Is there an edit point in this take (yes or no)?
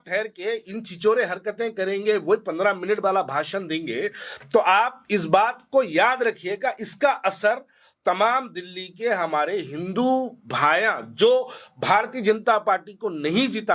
no